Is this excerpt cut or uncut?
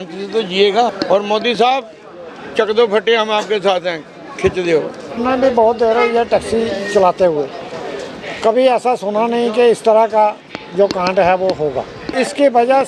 cut